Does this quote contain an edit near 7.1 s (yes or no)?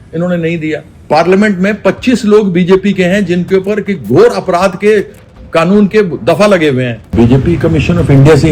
yes